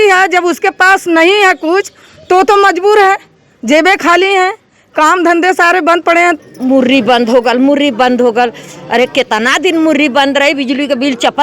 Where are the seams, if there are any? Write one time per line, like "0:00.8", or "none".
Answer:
0:06.4